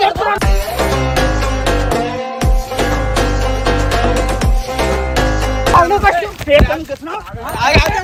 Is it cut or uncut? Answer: uncut